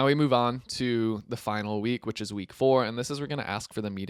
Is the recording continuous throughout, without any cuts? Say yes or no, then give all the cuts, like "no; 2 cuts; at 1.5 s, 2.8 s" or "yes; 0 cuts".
yes; 0 cuts